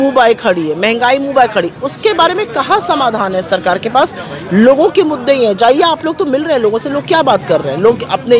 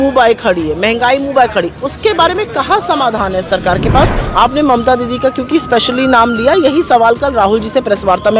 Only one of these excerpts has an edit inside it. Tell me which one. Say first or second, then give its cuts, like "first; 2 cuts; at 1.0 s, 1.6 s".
second; 1 cut; at 4.2 s